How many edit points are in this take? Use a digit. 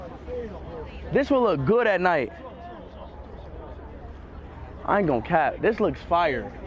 1